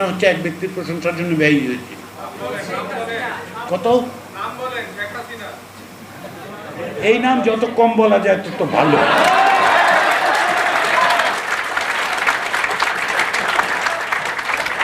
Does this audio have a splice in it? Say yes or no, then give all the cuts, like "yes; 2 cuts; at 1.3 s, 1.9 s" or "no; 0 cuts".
no; 0 cuts